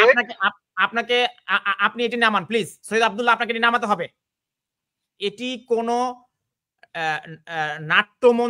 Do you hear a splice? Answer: no; 0 cuts

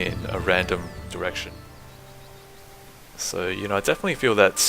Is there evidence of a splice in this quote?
yes; 1 cut; at 1.4 s

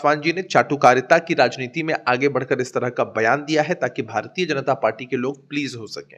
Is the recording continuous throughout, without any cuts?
yes; 0 cuts

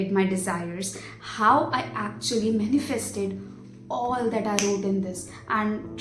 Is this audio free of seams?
yes; 0 cuts

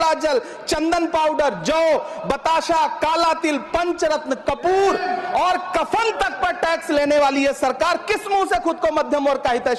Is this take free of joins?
yes; 0 cuts

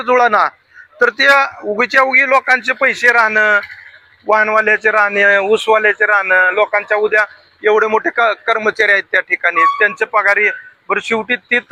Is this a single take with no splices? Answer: yes; 0 cuts

